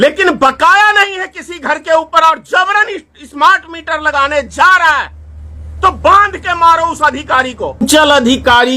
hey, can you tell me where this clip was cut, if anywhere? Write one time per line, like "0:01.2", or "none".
0:07.8